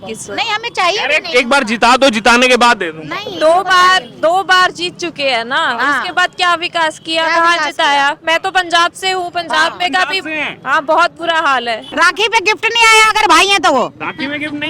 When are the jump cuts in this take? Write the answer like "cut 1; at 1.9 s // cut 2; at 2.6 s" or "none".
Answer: cut 1; at 11.8 s